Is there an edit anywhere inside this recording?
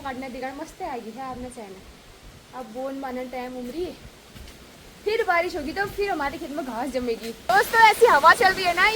yes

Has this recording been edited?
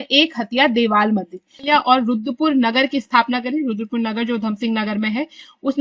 yes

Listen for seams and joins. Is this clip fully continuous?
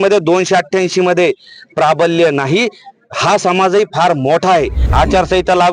no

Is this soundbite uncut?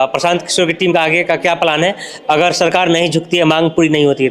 yes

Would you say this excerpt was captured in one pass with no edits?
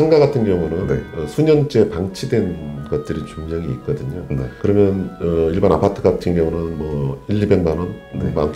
yes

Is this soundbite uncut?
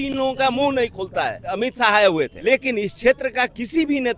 no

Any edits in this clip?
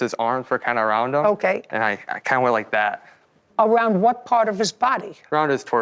no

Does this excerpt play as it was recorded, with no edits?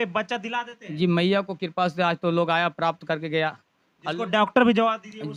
yes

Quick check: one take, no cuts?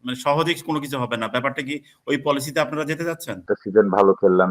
no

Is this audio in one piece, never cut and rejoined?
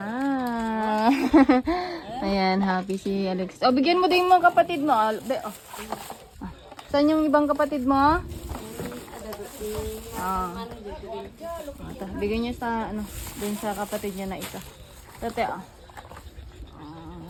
yes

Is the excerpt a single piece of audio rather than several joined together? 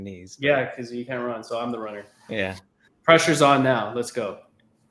no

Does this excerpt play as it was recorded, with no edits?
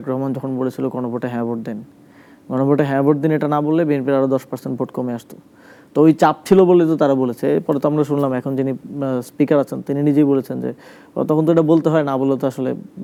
yes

